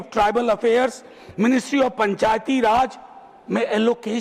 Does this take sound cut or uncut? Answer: uncut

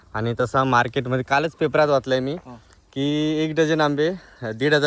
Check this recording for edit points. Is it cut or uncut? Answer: uncut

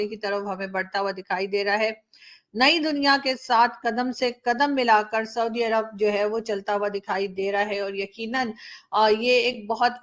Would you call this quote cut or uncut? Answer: uncut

